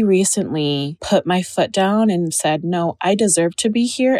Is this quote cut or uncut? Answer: cut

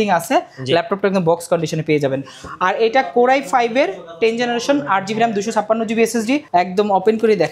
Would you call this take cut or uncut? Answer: cut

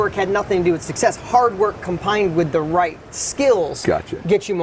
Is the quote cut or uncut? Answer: uncut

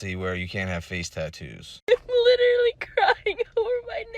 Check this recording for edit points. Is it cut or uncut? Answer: cut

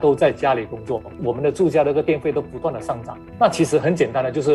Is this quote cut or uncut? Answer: cut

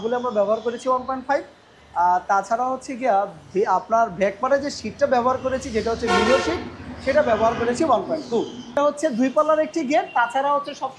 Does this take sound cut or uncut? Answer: cut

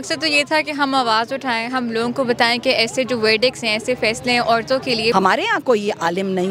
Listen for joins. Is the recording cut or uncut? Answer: cut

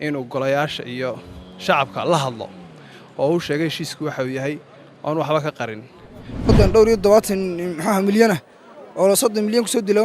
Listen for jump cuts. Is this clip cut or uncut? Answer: cut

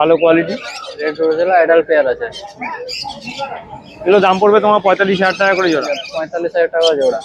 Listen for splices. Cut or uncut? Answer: uncut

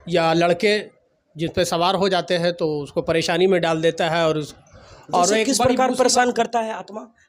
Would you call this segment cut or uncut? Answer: uncut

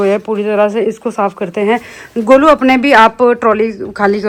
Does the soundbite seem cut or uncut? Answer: uncut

